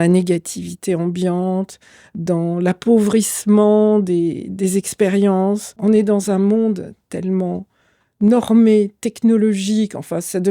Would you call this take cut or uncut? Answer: cut